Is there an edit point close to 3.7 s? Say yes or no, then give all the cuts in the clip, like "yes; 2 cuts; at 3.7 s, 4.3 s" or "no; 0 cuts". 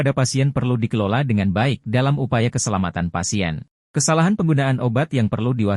yes; 1 cut; at 3.7 s